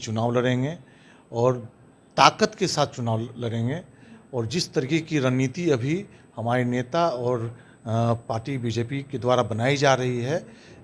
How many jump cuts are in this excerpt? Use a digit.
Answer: 0